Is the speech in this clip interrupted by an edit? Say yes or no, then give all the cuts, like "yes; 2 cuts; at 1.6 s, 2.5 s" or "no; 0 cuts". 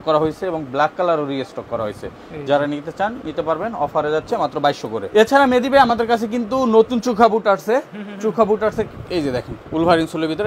no; 0 cuts